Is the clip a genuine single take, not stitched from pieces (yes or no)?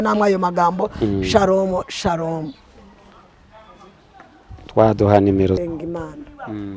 no